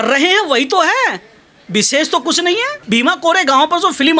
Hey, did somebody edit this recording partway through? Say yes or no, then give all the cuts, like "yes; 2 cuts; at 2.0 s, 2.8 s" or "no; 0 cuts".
yes; 1 cut; at 2.8 s